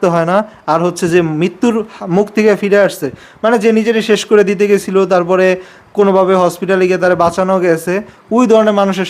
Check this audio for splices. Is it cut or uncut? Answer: uncut